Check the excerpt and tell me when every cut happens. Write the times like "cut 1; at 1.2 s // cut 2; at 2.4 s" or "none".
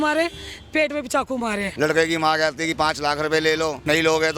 cut 1; at 1.7 s